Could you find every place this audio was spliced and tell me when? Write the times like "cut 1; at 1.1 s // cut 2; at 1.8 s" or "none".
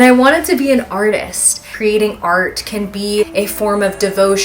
cut 1; at 1.7 s // cut 2; at 3.3 s